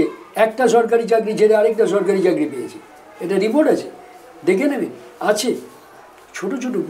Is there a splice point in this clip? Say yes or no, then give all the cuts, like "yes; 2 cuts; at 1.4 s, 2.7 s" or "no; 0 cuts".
no; 0 cuts